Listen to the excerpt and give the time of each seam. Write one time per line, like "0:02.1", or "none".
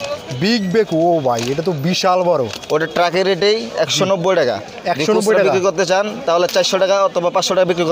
none